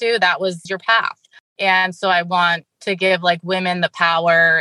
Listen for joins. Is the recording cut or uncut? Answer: uncut